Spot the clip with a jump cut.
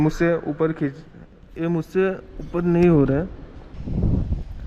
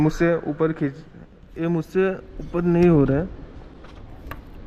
first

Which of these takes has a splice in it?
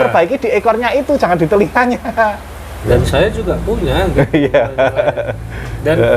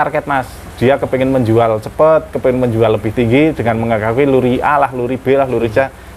first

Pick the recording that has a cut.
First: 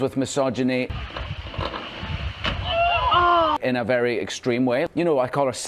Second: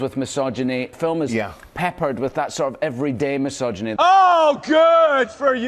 second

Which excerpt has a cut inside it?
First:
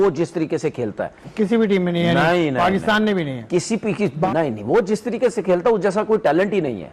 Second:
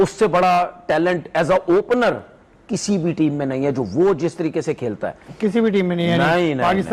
first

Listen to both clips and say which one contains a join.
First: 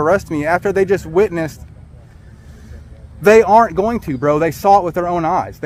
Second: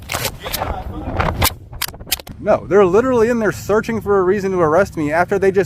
second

